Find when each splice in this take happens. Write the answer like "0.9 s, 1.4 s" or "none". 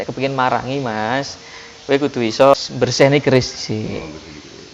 2.5 s